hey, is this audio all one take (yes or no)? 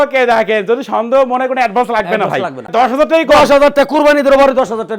no